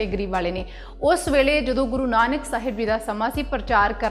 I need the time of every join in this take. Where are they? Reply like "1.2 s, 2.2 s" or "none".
none